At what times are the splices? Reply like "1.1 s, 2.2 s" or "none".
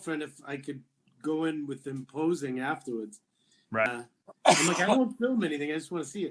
3.9 s